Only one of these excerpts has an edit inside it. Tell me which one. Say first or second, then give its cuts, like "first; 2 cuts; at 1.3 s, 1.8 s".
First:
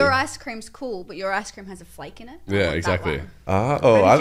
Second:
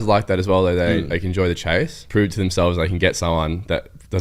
second; 1 cut; at 2.0 s